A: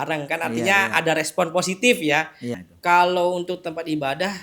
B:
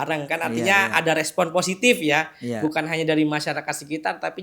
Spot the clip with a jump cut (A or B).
A